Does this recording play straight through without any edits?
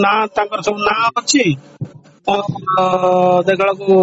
yes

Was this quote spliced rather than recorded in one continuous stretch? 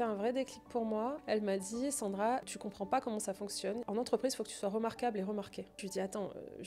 yes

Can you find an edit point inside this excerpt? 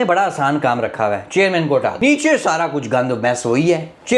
yes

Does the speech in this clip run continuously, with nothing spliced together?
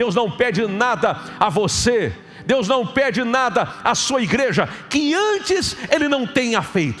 yes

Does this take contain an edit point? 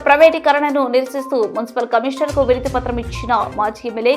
no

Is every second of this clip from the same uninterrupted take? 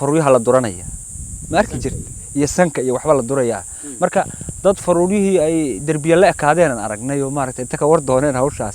yes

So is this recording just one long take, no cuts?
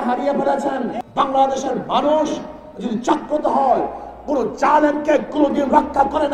no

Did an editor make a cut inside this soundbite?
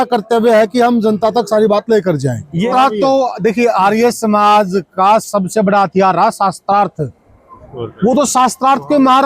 yes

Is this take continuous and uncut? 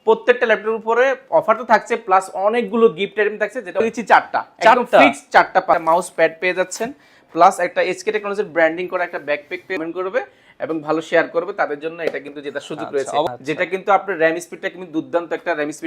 no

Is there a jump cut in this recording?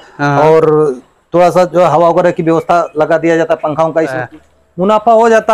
yes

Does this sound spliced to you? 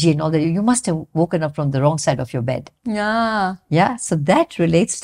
no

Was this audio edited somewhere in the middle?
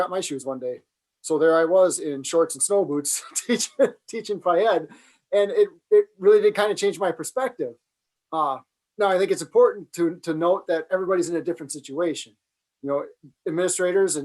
no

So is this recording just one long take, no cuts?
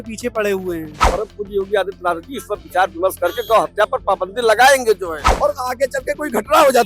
no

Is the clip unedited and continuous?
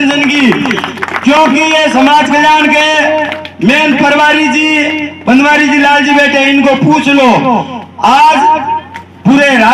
yes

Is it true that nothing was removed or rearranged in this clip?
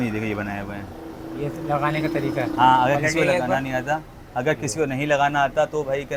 yes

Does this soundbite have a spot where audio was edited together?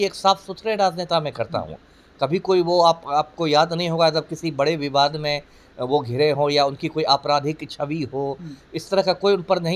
no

